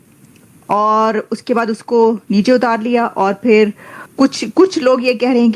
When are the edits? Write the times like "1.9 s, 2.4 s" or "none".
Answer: 4.0 s